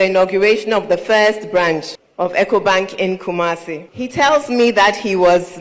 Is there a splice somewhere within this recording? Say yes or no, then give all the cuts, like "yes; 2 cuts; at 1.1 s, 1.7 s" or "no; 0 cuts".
yes; 2 cuts; at 2.0 s, 3.8 s